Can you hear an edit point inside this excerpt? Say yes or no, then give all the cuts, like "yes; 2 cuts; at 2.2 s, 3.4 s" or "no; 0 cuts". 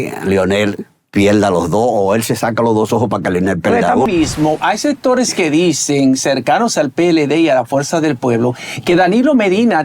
yes; 1 cut; at 4.1 s